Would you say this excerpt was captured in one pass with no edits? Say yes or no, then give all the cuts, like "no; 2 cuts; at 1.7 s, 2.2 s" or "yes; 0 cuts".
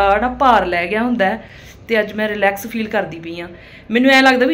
yes; 0 cuts